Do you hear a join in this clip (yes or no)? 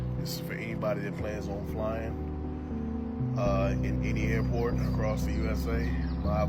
no